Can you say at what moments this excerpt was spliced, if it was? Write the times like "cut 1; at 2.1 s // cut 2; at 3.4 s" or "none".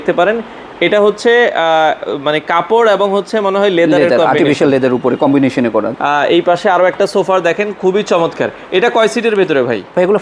cut 1; at 5.9 s